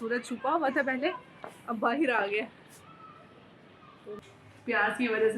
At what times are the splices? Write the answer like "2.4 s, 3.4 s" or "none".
4.1 s